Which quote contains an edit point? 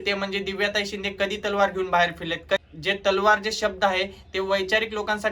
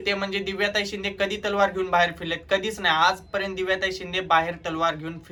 first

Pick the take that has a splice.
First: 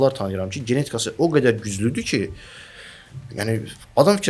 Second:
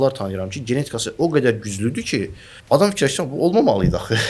second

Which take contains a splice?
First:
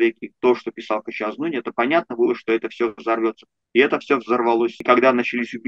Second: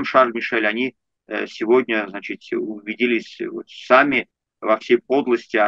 first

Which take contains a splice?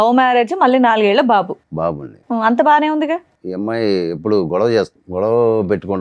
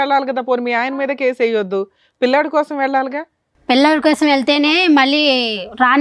first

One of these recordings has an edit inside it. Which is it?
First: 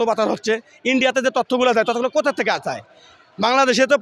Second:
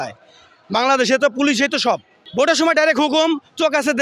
second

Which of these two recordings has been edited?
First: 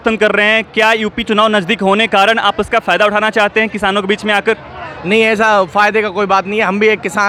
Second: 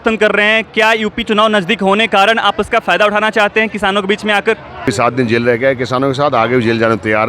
second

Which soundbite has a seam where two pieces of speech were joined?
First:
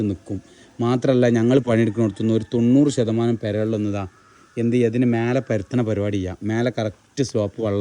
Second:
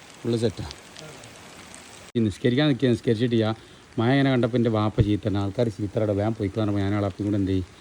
second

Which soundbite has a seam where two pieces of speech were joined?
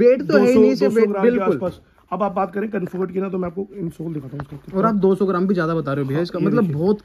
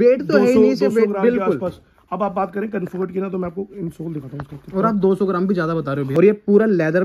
second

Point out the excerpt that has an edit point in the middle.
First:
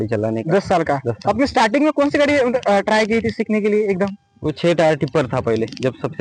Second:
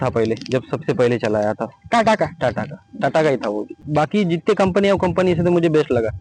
second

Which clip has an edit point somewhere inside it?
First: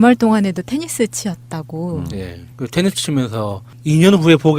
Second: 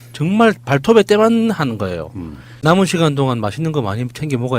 second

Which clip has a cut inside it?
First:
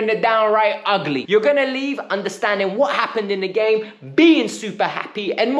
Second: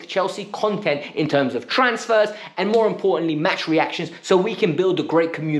first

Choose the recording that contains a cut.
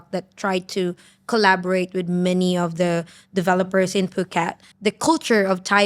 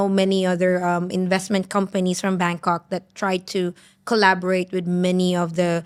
first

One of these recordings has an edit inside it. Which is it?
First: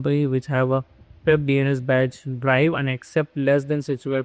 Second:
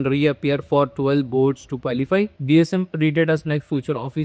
second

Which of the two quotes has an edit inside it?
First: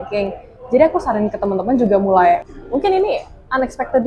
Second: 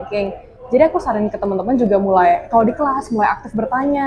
first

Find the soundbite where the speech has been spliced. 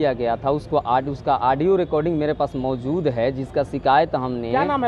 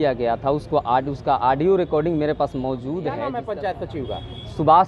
second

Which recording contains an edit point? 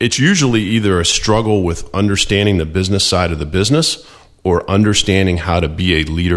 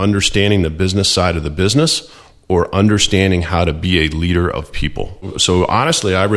second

